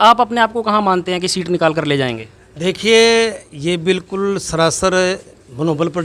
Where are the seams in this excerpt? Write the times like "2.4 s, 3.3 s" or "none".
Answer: none